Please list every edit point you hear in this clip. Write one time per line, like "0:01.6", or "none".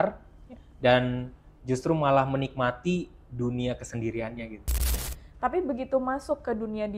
0:04.9